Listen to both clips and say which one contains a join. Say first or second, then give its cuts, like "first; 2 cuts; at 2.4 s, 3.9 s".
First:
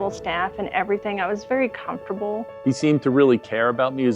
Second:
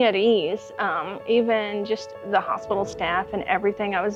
first; 1 cut; at 2.5 s